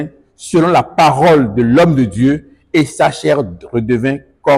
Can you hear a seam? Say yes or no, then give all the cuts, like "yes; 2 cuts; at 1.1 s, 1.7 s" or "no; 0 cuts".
no; 0 cuts